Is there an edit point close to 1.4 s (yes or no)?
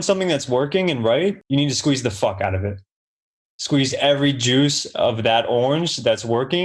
yes